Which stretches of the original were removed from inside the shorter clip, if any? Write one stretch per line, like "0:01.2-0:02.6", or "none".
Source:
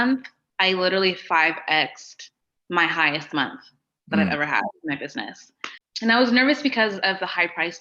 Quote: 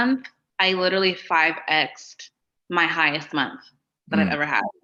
none